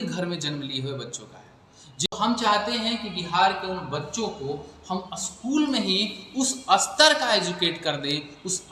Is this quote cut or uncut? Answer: cut